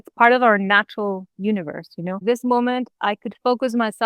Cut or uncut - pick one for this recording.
cut